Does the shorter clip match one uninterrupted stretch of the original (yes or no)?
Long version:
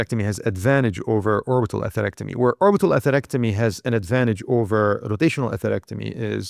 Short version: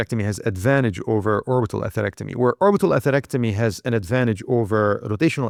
yes